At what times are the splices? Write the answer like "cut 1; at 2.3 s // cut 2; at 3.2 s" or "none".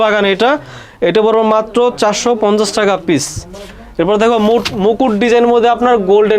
none